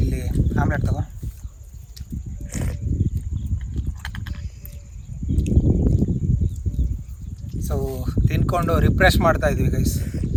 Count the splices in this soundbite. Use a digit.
0